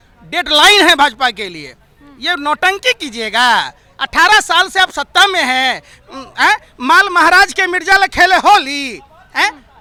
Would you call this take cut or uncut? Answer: uncut